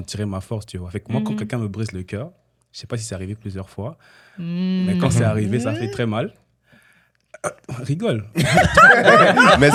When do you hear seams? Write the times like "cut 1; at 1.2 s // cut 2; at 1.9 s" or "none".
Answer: none